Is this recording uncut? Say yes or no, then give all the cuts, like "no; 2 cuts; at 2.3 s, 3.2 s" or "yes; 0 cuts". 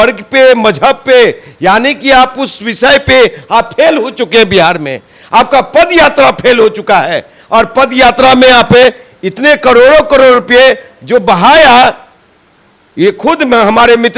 yes; 0 cuts